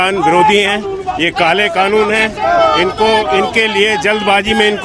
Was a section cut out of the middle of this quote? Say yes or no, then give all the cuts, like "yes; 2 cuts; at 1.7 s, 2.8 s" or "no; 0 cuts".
no; 0 cuts